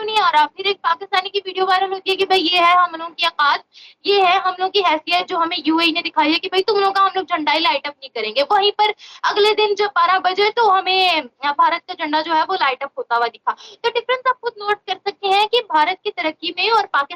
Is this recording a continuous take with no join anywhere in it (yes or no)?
yes